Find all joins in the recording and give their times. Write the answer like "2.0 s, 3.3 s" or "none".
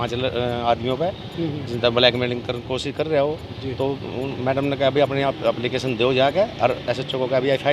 none